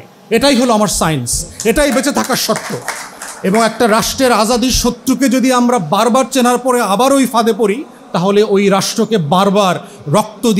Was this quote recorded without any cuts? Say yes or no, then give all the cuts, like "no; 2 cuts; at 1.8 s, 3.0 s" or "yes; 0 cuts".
yes; 0 cuts